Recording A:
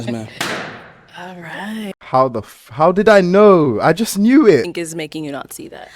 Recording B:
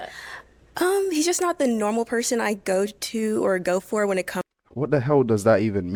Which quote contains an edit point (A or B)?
A